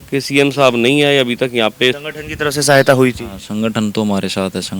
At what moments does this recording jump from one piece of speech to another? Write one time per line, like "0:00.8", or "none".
0:02.0